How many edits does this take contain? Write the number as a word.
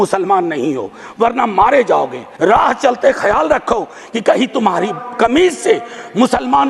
one